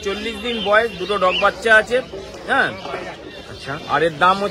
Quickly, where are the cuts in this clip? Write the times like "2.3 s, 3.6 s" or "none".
none